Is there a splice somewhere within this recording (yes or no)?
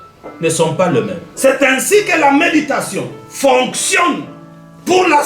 yes